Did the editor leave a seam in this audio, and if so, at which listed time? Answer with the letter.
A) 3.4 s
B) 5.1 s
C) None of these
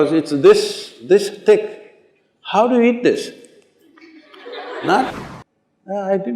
B